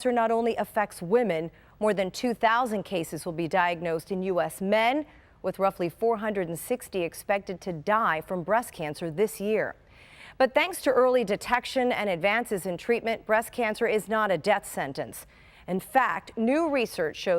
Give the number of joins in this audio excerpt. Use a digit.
1